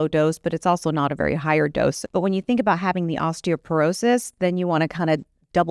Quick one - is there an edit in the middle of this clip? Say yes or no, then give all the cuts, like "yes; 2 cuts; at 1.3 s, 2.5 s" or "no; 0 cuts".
yes; 1 cut; at 2.0 s